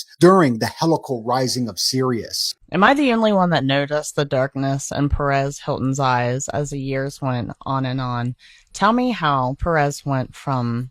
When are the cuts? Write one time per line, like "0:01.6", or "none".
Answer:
0:02.4